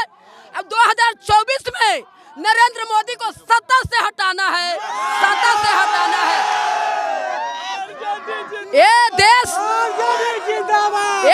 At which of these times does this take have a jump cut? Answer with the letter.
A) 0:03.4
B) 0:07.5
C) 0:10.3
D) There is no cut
D